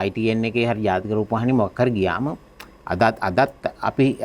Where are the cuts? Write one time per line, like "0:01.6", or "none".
none